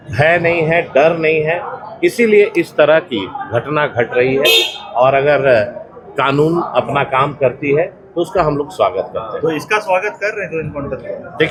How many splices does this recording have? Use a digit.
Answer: 0